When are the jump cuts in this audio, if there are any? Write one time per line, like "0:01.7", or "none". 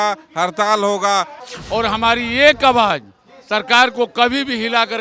0:01.3